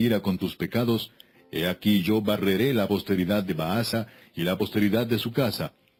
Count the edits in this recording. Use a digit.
0